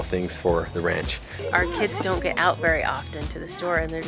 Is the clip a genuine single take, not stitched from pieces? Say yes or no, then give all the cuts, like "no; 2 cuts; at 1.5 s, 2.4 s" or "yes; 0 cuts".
no; 1 cut; at 1.4 s